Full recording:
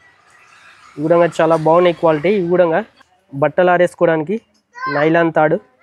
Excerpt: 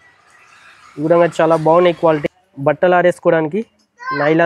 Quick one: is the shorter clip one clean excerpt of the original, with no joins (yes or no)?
no